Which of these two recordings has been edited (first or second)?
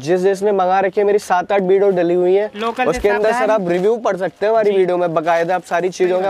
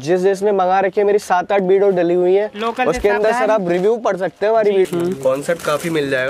second